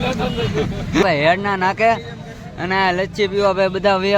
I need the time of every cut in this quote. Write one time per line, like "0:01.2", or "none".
0:01.0